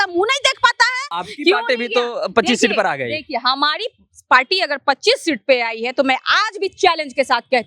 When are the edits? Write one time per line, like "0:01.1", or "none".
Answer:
0:01.1